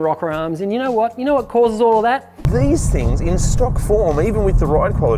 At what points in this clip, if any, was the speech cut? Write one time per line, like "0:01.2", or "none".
0:02.3